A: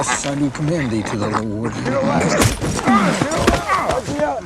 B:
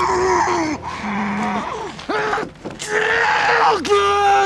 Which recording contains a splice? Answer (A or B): A